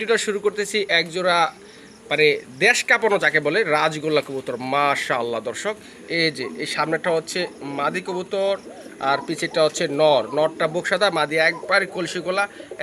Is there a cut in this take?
no; 0 cuts

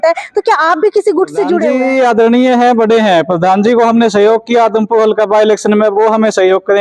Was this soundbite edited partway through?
yes; 1 cut; at 1.7 s

